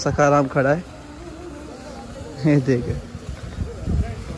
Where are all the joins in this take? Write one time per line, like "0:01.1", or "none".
none